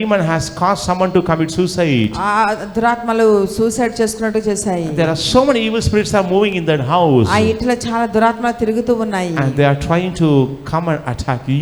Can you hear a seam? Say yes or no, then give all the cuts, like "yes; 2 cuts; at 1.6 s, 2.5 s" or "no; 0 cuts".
no; 0 cuts